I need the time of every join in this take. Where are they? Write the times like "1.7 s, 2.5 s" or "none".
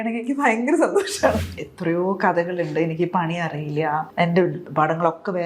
1.5 s, 4.1 s